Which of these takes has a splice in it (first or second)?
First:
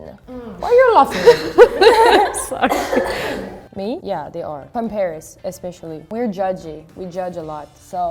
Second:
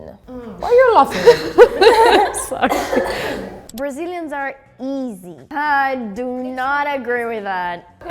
second